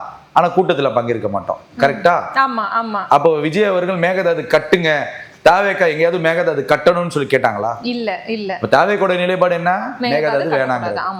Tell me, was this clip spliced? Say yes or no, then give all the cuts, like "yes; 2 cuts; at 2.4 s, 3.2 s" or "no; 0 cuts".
no; 0 cuts